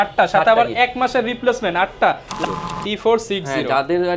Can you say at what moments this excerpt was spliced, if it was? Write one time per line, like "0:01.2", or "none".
0:02.4